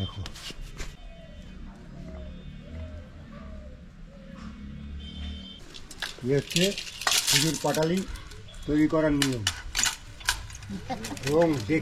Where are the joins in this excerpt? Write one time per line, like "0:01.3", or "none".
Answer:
0:00.9
0:05.8